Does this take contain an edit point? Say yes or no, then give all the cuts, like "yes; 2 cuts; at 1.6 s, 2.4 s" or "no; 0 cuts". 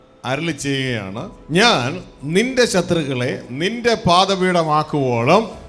yes; 1 cut; at 1.3 s